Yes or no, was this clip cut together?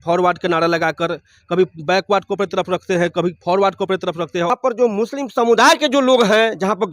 yes